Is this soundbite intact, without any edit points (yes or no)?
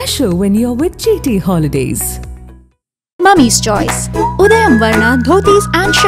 yes